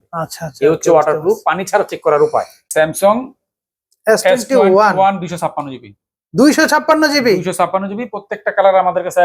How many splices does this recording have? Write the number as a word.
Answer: one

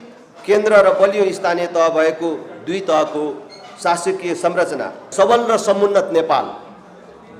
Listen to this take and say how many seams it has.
one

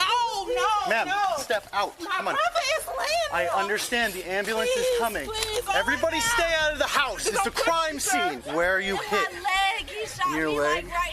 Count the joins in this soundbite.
two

